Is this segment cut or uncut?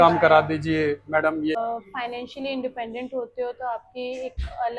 cut